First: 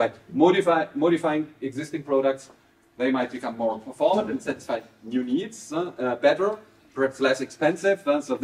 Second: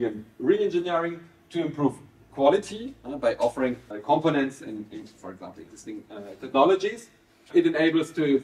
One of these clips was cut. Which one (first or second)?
second